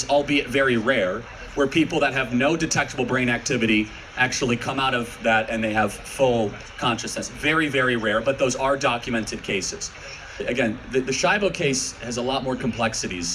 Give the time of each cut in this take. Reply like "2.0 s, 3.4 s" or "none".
10.4 s